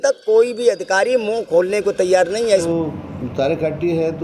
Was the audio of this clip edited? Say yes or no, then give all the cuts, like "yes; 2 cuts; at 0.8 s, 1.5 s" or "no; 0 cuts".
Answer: yes; 1 cut; at 2.6 s